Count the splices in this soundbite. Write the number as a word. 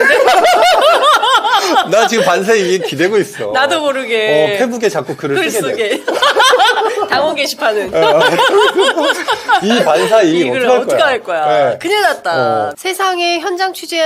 one